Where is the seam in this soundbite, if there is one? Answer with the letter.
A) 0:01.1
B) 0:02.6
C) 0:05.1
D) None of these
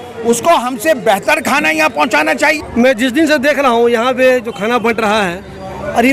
B